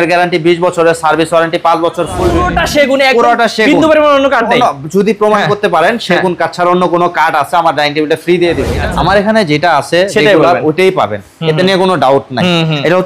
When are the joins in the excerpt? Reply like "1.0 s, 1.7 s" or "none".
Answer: 2.4 s, 8.7 s